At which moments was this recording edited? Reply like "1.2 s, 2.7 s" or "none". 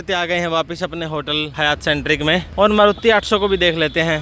1.5 s, 2.5 s